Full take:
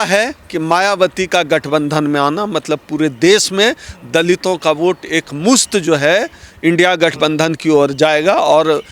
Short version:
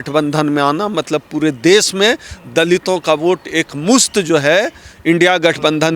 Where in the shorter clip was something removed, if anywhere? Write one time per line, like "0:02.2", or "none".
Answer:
none

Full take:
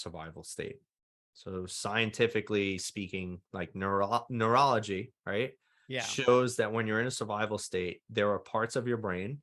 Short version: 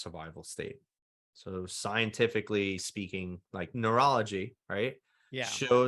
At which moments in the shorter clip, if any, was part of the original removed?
0:03.7

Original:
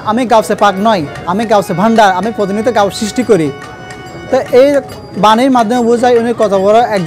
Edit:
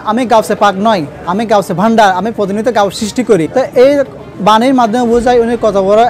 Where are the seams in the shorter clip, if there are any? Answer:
0:03.5

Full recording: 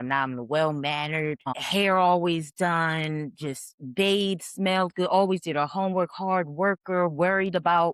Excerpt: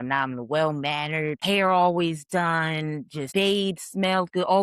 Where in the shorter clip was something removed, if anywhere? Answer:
0:01.4
0:03.2

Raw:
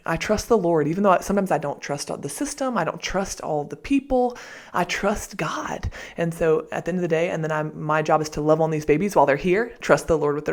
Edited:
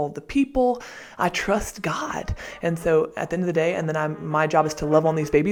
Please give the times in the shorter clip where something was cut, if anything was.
none

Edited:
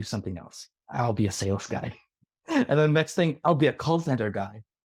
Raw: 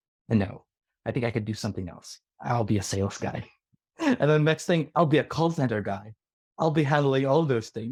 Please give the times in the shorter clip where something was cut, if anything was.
none

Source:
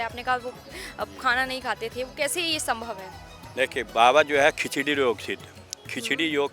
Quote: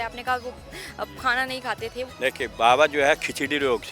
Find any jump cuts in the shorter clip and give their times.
0:02.1

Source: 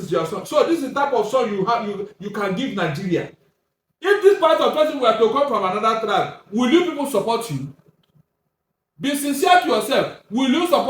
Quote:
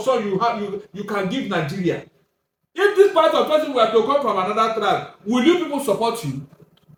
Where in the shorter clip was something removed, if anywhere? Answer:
none

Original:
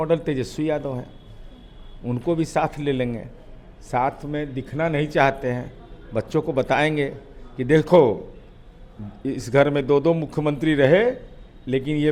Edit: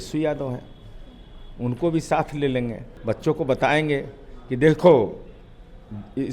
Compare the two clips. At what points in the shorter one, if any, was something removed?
0:02.9

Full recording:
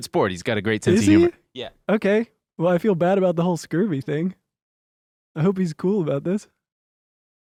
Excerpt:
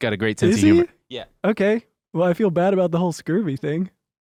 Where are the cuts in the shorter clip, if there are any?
none

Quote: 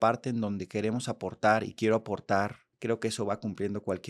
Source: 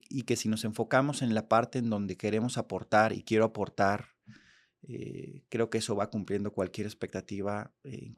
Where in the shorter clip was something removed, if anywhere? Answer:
0:02.7

